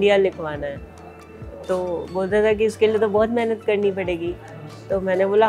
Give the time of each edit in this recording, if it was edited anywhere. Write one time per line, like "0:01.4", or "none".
none